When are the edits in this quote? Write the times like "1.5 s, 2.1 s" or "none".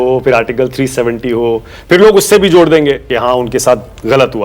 3.1 s

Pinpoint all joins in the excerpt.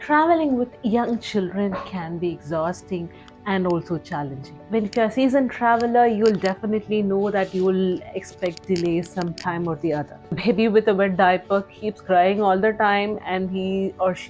4.5 s, 10.3 s

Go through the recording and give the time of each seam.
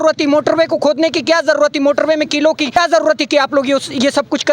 2.8 s

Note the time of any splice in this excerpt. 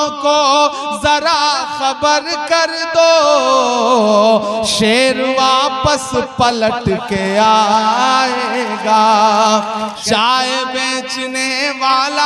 10.0 s

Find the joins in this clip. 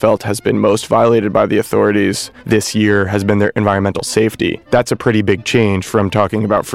2.3 s, 4.6 s

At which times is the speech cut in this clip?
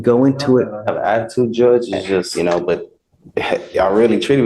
2.3 s

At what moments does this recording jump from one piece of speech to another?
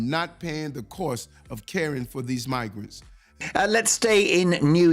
3.4 s

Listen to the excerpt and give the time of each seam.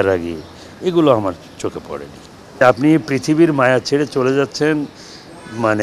2.5 s

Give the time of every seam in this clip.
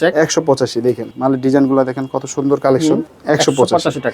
1.1 s, 3.1 s

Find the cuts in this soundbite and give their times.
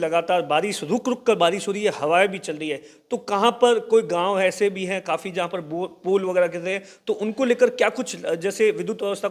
none

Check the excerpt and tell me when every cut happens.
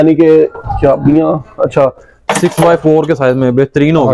2.1 s

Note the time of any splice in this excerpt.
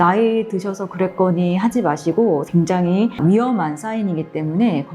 2.5 s

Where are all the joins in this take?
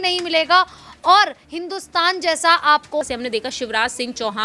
3.0 s

